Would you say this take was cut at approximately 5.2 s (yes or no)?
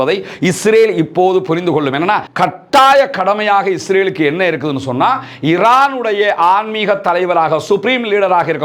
no